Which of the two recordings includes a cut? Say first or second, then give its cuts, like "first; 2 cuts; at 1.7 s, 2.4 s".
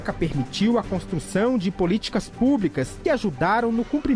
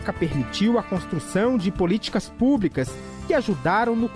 first; 1 cut; at 2.9 s